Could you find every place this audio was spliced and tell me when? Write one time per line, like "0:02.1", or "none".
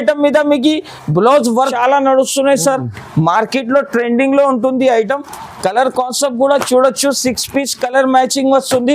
0:01.7